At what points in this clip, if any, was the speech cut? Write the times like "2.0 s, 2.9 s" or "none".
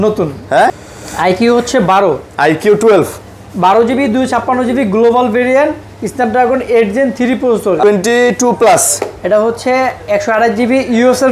0.9 s, 7.8 s